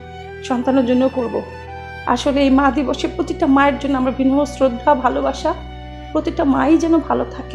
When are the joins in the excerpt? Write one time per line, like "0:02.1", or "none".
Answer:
none